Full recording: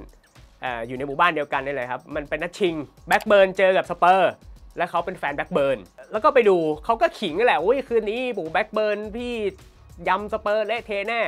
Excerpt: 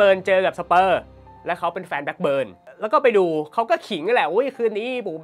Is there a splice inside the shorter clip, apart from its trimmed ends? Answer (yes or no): no